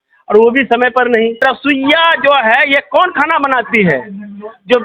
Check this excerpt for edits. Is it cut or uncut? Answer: cut